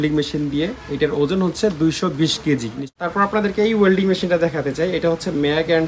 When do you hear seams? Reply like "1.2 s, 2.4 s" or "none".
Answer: 2.8 s